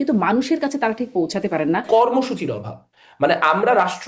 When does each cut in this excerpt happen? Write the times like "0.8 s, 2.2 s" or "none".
1.8 s